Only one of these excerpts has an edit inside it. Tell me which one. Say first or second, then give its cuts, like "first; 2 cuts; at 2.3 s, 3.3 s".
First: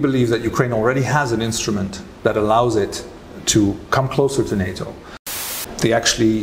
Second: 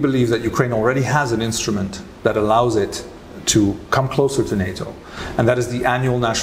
first; 1 cut; at 5.2 s